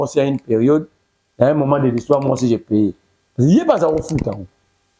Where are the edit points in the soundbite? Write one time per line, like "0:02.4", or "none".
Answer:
none